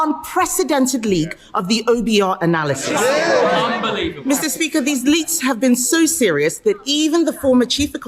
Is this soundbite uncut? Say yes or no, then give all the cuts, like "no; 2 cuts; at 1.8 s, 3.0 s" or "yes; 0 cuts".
yes; 0 cuts